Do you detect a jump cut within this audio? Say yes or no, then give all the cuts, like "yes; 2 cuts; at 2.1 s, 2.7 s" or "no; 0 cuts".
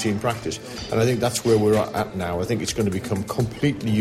no; 0 cuts